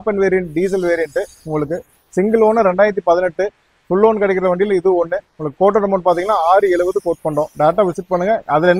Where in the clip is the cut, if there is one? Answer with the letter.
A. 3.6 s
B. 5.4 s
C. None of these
C